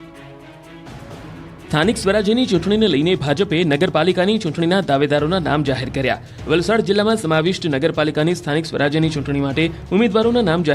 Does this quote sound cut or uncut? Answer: cut